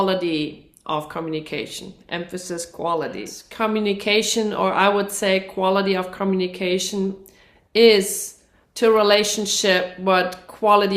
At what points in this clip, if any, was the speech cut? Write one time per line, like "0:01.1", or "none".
0:03.4